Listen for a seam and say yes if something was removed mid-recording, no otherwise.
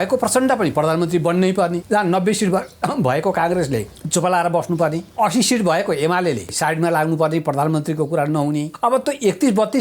yes